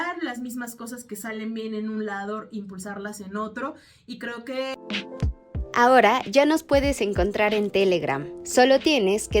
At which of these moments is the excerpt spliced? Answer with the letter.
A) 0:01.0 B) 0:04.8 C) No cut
B